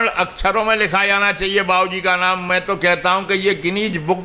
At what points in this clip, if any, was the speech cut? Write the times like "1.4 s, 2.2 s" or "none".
none